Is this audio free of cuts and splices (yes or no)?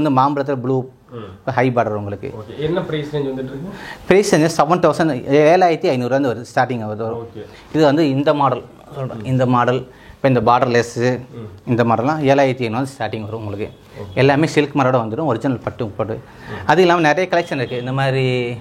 yes